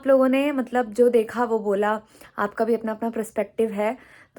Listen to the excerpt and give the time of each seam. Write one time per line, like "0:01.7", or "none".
none